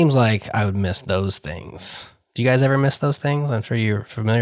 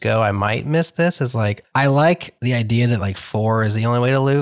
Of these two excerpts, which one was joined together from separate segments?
second; 2 cuts; at 1.6 s, 2.3 s

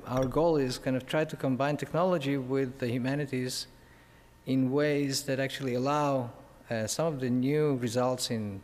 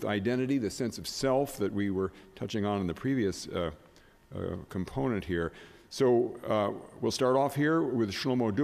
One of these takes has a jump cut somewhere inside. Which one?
first; 1 cut; at 5.1 s

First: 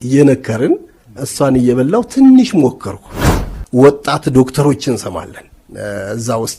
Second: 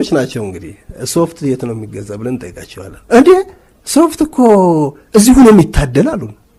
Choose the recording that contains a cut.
first; 1 cut; at 3.2 s

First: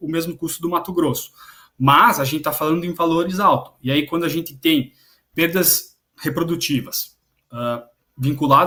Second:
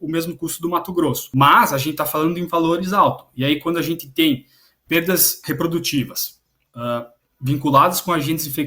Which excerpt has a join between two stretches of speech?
second; 2 cuts; at 1.2 s, 5.3 s

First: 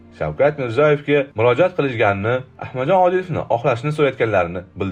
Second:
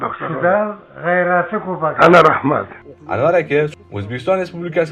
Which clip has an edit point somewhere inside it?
second; 2 cuts; at 2.8 s, 3.7 s

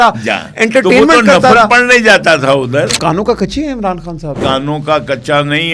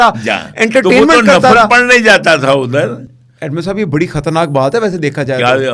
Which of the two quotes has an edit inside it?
first; 2 cuts; at 3.0 s, 4.4 s

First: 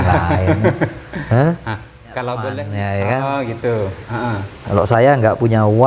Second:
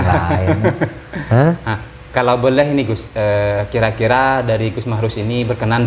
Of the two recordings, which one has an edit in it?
first; 1 cut; at 2.6 s

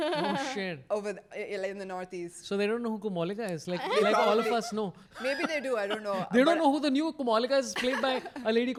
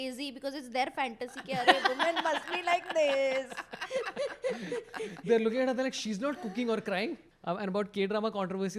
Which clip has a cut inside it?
second; 1 cut; at 7.3 s

